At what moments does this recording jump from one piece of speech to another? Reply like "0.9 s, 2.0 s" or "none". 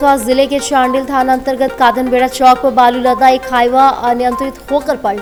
none

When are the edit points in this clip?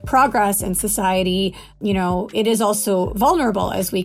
1.8 s

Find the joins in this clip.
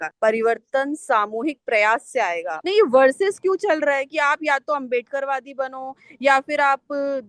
2.5 s

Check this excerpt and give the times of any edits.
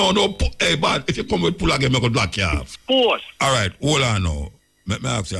2.7 s

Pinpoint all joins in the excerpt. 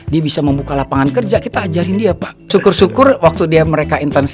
2.5 s

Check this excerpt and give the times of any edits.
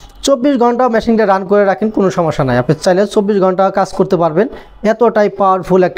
none

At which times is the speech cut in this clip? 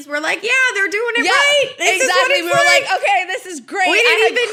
none

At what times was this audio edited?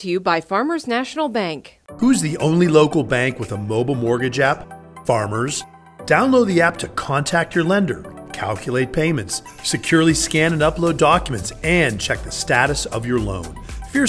none

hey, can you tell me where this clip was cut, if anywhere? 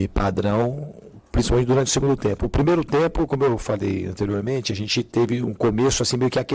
none

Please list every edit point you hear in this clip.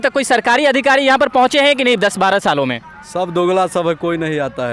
none

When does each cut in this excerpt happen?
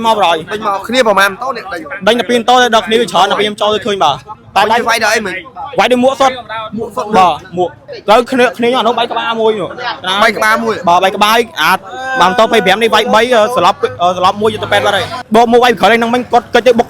4.3 s, 7.9 s, 15.2 s

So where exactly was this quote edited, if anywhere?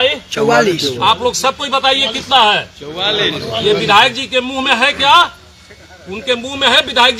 none

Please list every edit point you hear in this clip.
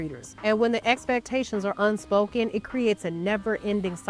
2.4 s

